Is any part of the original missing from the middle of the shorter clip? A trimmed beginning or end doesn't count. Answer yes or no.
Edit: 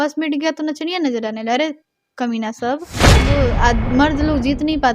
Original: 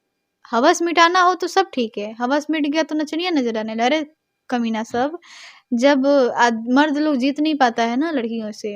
yes